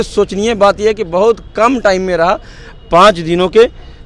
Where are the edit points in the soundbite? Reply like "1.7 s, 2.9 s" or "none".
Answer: none